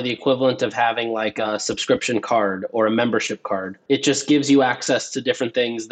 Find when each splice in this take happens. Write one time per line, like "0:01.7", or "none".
0:01.4
0:03.8